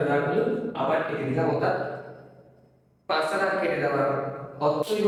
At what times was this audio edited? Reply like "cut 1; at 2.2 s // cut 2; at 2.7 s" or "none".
none